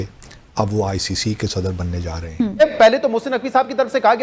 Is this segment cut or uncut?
cut